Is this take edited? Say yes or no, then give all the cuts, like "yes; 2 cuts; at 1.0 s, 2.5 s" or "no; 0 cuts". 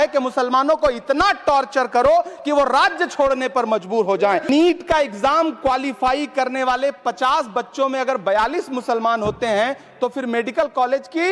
yes; 1 cut; at 4.5 s